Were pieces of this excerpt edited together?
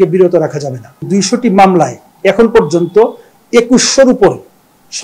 yes; 1 cut; at 1.1 s

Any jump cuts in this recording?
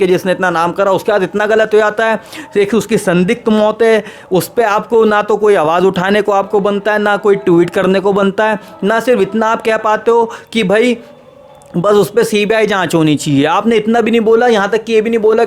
no; 0 cuts

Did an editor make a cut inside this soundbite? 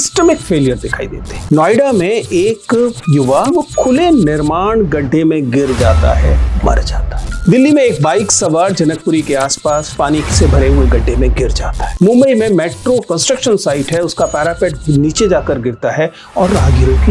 no; 0 cuts

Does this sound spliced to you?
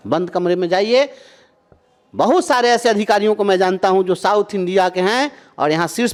no; 0 cuts

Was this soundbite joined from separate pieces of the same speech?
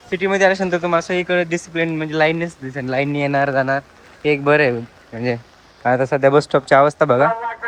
no; 0 cuts

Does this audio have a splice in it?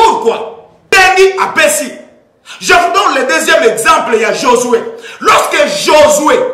yes; 1 cut; at 0.9 s

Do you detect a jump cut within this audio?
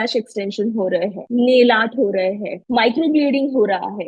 yes; 2 cuts; at 1.2 s, 2.5 s

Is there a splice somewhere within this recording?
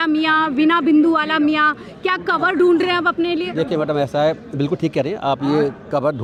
no; 0 cuts

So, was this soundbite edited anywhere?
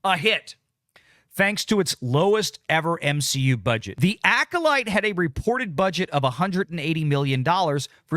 yes; 1 cut; at 3.9 s

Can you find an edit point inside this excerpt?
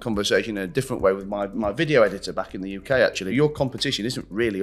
yes; 1 cut; at 3.3 s

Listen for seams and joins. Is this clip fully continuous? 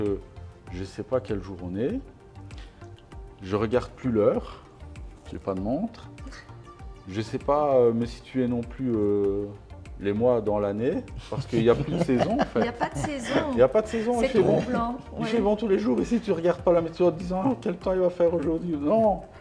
yes; 0 cuts

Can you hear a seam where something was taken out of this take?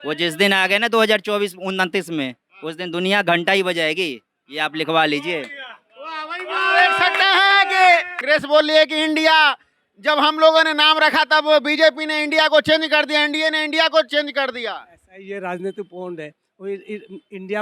yes; 1 cut; at 8.1 s

